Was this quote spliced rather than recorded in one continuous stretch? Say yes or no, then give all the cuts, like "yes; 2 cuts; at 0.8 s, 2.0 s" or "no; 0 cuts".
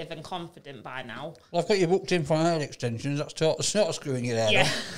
no; 0 cuts